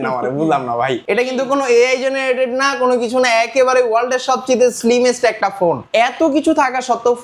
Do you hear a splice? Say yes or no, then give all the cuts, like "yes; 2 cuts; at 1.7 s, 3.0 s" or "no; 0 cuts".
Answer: yes; 2 cuts; at 1.0 s, 5.8 s